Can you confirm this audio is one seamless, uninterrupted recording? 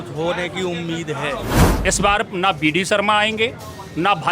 no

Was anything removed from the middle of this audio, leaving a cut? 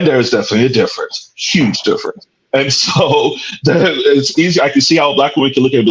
no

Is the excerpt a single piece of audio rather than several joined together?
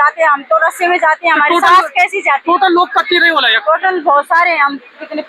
yes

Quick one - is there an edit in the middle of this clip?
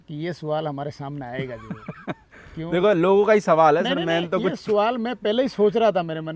no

